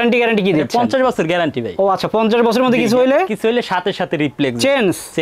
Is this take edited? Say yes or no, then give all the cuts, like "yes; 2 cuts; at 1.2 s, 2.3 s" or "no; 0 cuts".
no; 0 cuts